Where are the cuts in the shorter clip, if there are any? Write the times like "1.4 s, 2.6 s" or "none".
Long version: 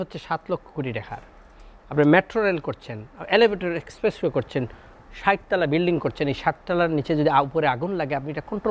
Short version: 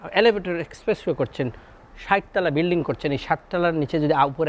none